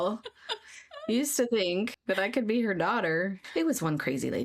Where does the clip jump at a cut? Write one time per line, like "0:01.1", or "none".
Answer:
0:02.0
0:03.4

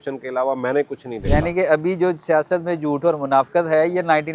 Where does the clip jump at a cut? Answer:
none

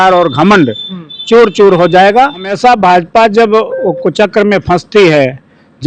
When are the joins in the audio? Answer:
0:02.5

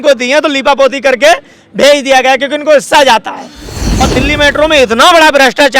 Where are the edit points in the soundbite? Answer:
0:03.8

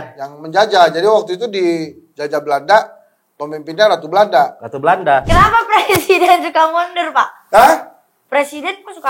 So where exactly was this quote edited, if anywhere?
0:05.3

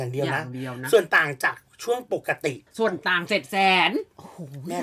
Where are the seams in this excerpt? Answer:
0:02.6

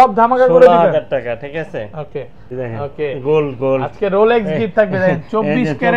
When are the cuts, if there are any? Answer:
none

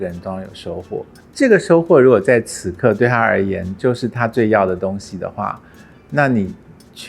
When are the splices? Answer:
none

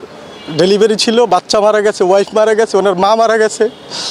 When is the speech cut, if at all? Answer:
none

